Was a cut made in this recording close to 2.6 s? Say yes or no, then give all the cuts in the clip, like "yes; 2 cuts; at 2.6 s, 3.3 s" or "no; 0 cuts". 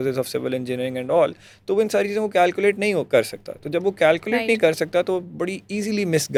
no; 0 cuts